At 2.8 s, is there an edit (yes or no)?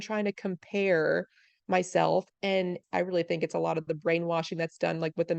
yes